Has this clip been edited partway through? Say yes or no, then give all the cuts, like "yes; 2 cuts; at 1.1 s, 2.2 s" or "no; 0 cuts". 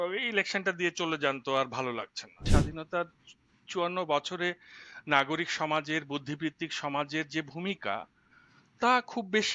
yes; 1 cut; at 2.5 s